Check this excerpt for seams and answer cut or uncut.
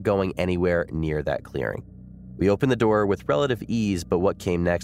uncut